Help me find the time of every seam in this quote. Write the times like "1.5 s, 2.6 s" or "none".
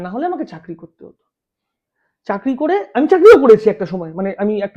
none